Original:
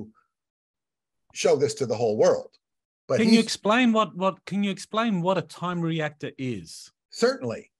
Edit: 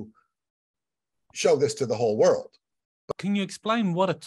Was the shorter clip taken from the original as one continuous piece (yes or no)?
no